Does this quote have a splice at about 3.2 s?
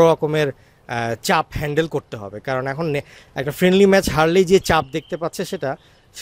no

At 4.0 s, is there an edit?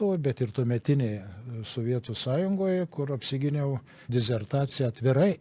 yes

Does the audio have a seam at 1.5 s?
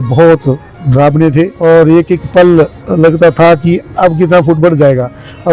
yes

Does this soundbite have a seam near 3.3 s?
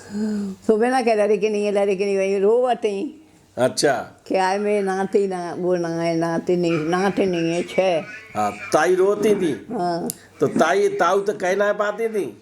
no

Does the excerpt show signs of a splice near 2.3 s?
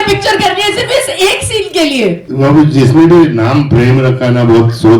yes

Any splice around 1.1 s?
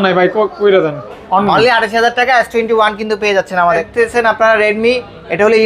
yes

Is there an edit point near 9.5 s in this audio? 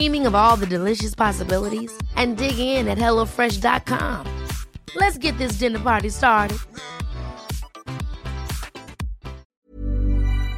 yes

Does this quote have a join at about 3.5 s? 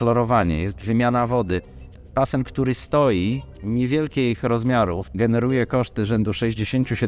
no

